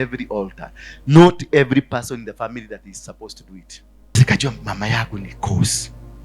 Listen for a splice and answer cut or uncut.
cut